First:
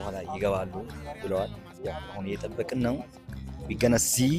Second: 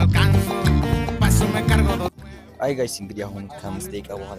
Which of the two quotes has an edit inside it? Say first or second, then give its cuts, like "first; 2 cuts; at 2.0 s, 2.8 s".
second; 1 cut; at 0.9 s